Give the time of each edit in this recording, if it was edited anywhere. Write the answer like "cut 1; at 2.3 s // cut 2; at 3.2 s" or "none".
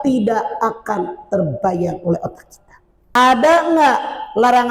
cut 1; at 3.1 s